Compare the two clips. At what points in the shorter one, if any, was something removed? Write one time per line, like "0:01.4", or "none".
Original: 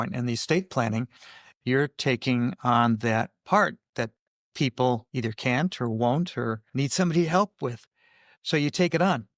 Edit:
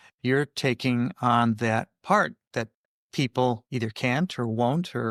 none